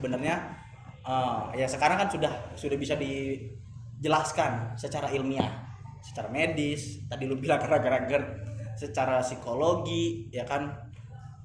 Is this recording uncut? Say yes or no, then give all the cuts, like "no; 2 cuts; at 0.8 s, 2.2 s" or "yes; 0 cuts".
yes; 0 cuts